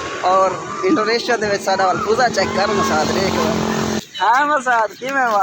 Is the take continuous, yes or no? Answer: no